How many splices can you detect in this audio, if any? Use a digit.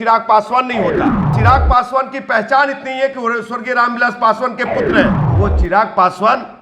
2